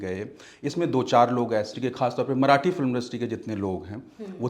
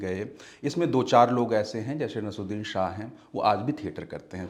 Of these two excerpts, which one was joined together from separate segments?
first; 1 cut; at 1.7 s

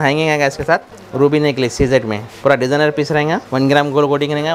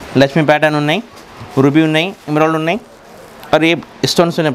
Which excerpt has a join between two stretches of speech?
first; 3 cuts; at 1.0 s, 2.2 s, 3.5 s

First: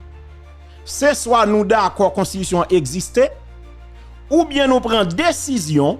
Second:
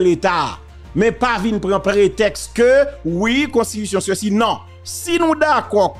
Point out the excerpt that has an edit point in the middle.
first; 1 cut; at 1.0 s

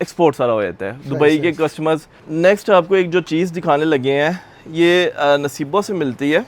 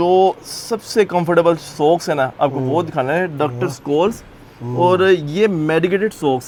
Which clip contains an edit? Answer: first; 1 cut; at 2.2 s

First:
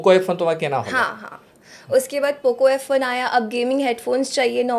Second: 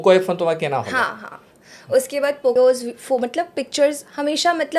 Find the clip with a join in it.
second; 1 cut; at 2.5 s

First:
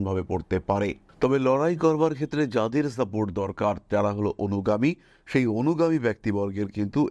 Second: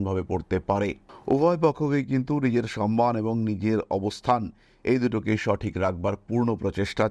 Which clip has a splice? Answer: first; 1 cut; at 1.1 s

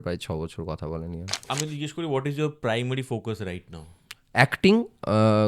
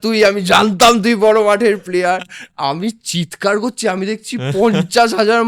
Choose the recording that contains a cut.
first; 1 cut; at 1.4 s

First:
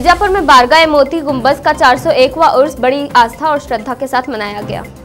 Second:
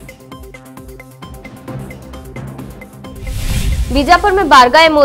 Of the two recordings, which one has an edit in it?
second; 2 cuts; at 0.8 s, 3.0 s

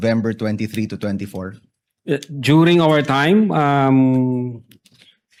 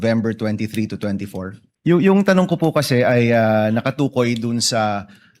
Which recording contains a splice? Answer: second; 1 cut; at 1.7 s

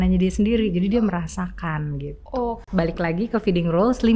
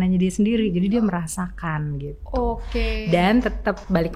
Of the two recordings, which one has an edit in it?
first; 1 cut; at 2.6 s

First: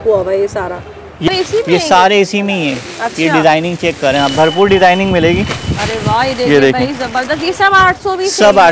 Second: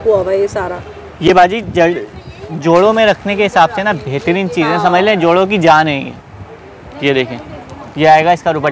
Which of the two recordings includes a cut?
first; 1 cut; at 1.3 s

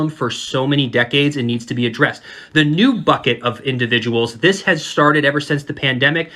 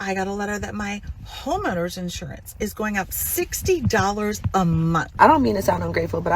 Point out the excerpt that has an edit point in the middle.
second; 1 cut; at 5.1 s

